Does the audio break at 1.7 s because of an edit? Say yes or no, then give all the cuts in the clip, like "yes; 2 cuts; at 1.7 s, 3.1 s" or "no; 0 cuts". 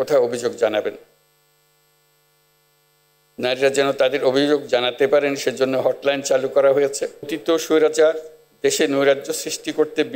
no; 1 cut; at 7.3 s